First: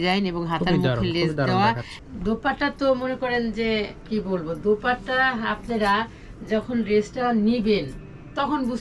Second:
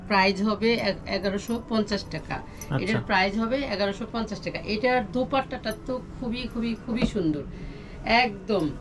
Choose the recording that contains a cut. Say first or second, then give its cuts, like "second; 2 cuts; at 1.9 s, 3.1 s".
first; 1 cut; at 1.9 s